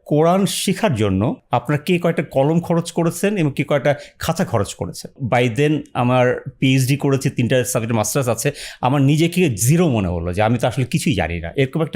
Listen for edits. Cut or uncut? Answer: cut